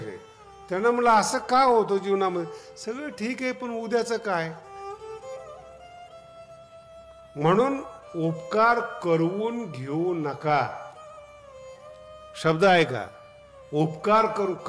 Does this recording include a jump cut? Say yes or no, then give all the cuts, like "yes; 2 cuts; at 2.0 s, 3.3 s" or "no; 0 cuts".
yes; 2 cuts; at 4.6 s, 6.7 s